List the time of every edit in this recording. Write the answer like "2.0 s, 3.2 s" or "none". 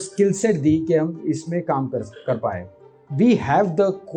none